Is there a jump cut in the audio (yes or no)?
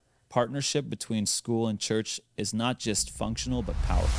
no